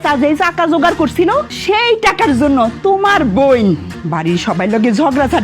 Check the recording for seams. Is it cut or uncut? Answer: cut